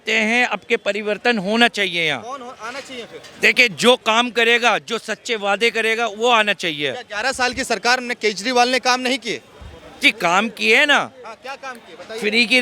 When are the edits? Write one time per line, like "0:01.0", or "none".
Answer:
none